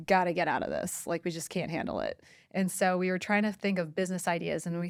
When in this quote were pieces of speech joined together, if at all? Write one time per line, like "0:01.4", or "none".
none